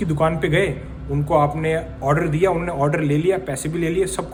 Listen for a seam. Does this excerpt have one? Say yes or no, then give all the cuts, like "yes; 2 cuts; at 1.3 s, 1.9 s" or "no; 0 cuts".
no; 0 cuts